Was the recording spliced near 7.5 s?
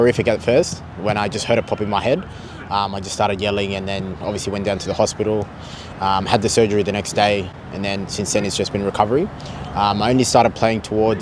no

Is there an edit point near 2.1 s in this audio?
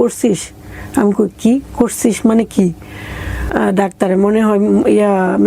no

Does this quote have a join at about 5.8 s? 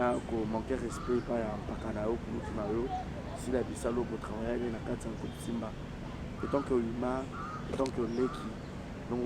no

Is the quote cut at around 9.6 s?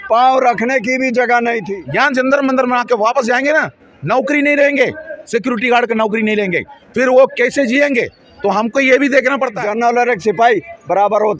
yes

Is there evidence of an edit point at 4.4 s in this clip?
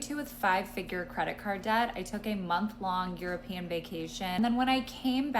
yes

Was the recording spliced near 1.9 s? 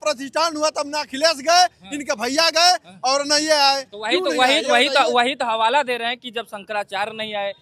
no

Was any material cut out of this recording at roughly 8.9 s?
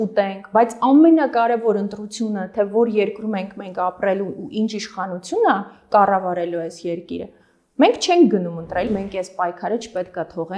yes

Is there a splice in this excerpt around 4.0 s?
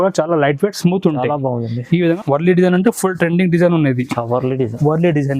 no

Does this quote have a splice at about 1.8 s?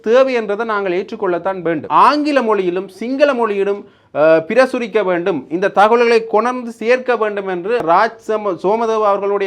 yes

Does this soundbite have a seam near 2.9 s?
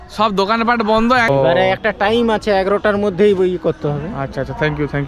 no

